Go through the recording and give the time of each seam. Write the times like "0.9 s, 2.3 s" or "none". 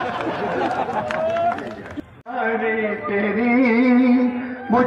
none